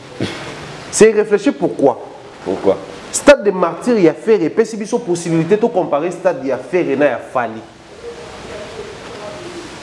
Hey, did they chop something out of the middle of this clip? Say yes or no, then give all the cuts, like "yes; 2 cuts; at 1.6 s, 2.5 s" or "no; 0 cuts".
no; 0 cuts